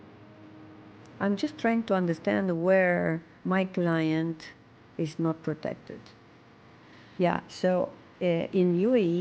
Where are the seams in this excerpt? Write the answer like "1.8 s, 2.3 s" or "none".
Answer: 6.4 s